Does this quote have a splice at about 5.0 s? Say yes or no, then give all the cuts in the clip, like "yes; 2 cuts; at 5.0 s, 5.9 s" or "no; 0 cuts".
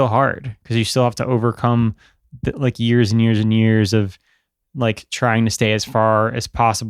no; 0 cuts